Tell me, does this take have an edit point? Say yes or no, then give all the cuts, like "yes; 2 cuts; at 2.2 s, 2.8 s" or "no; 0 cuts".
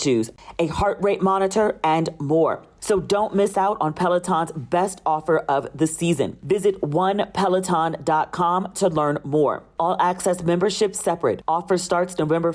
yes; 1 cut; at 2.7 s